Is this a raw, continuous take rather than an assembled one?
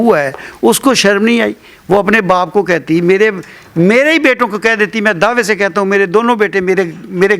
yes; 0 cuts

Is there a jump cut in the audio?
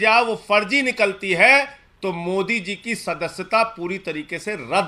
no; 0 cuts

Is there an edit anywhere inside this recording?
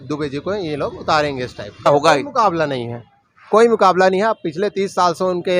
yes; 1 cut; at 1.9 s

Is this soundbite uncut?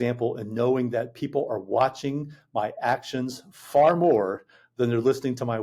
yes; 0 cuts

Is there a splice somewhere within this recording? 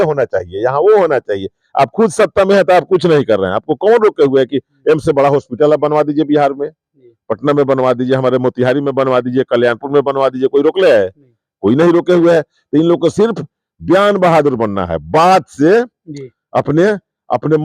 no; 0 cuts

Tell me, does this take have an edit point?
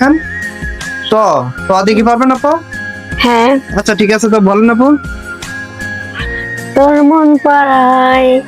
yes; 1 cut; at 3.2 s

